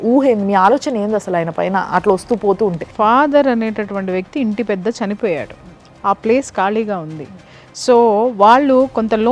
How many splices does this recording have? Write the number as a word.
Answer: zero